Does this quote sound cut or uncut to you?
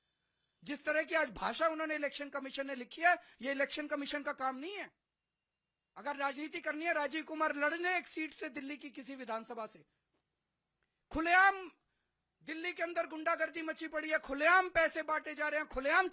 uncut